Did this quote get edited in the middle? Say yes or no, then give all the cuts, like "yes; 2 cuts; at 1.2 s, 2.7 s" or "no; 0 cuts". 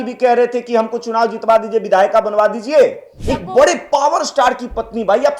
yes; 1 cut; at 3.1 s